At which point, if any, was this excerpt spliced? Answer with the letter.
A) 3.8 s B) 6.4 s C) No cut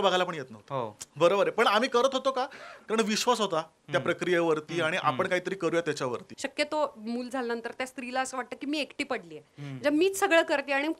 B